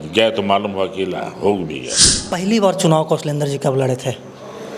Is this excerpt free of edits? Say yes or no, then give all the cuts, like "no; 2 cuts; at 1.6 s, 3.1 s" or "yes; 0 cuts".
no; 1 cut; at 2.2 s